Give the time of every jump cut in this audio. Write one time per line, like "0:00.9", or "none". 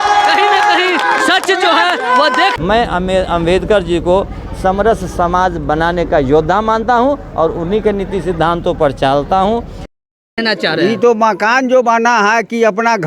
0:02.5
0:09.8